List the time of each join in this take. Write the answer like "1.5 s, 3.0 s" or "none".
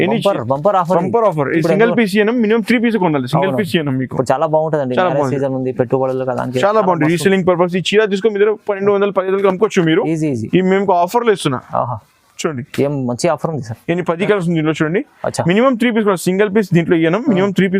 none